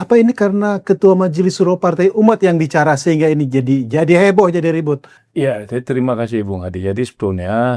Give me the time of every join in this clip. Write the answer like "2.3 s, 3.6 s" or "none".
5.2 s